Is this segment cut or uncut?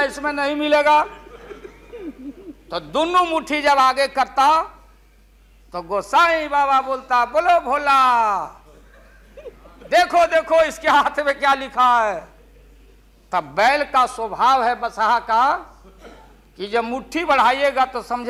uncut